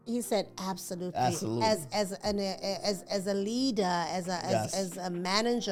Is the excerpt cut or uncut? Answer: uncut